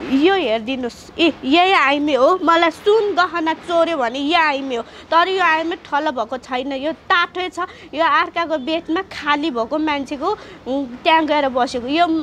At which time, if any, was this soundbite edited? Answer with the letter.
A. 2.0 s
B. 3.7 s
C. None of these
C